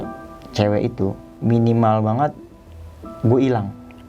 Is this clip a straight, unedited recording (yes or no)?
no